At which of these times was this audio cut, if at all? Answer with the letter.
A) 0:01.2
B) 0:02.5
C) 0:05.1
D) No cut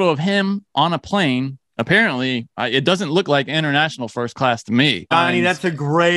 C